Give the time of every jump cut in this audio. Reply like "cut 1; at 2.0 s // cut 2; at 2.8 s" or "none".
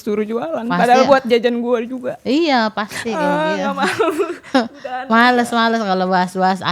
none